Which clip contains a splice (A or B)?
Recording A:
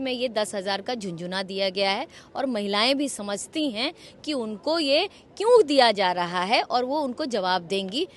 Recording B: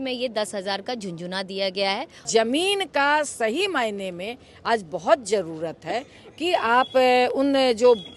B